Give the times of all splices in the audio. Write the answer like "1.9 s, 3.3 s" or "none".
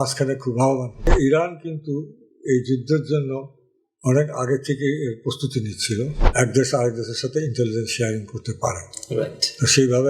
1.1 s, 6.2 s